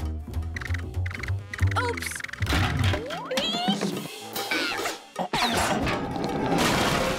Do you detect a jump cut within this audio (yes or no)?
no